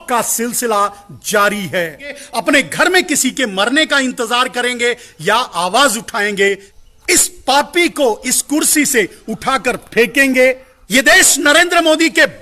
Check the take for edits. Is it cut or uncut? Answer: cut